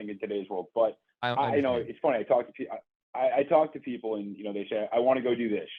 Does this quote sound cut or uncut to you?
uncut